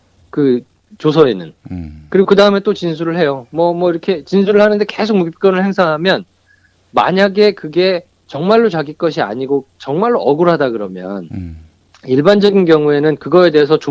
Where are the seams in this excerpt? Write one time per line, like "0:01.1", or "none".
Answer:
0:09.1

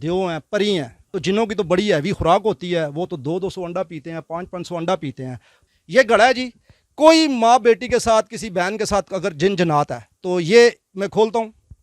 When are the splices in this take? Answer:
0:01.1
0:05.5

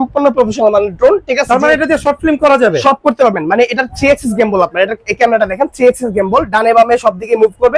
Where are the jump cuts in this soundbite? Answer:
none

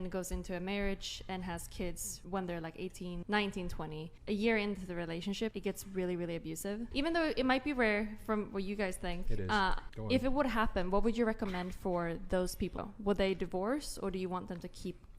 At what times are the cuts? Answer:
0:02.1
0:03.2
0:04.1
0:05.6
0:06.8
0:09.9
0:12.8

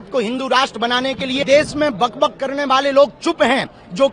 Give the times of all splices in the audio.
0:01.4

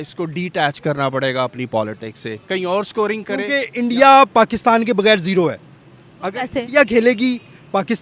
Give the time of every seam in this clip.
0:03.6

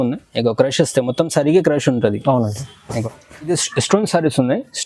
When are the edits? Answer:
0:03.5

